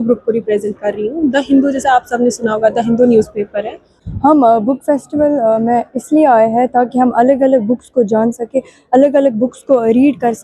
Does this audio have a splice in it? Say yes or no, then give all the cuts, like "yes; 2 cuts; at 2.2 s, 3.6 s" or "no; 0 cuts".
yes; 1 cut; at 4.0 s